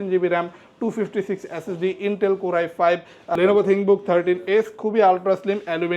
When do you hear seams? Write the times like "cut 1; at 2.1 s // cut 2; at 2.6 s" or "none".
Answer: cut 1; at 3.2 s